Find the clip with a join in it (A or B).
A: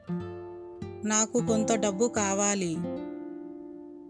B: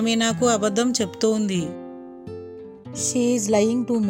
A